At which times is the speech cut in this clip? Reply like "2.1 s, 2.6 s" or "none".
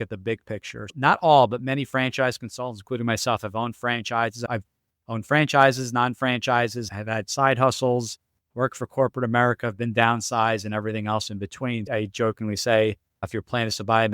11.8 s